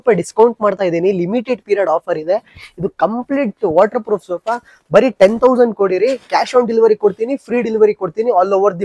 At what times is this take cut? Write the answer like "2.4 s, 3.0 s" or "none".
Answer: none